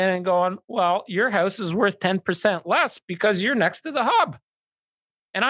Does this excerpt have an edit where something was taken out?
no; 0 cuts

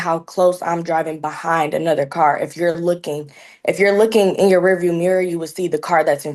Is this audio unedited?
yes; 0 cuts

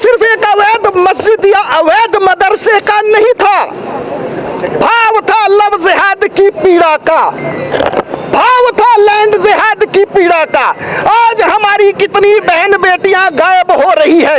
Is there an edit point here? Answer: no; 0 cuts

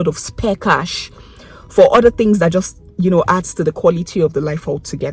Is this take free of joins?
yes; 0 cuts

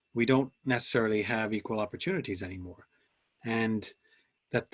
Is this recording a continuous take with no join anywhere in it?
yes; 0 cuts

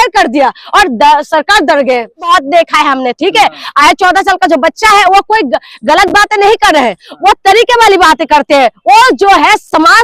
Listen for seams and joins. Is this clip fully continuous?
no; 1 cut; at 2.2 s

